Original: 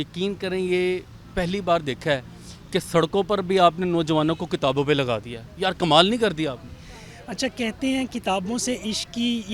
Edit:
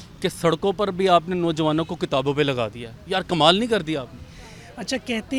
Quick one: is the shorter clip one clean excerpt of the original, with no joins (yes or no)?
yes